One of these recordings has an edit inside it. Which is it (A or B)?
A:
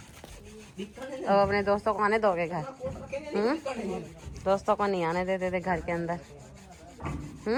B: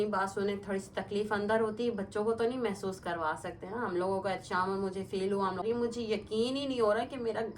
B